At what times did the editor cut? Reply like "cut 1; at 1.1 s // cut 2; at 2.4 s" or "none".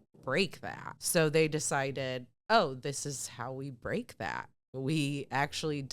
cut 1; at 0.9 s